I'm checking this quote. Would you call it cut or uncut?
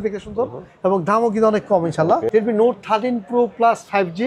cut